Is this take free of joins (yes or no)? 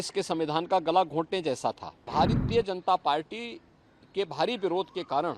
no